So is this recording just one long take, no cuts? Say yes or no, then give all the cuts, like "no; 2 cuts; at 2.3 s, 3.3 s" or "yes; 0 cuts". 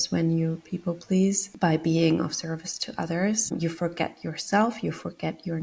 no; 1 cut; at 1.5 s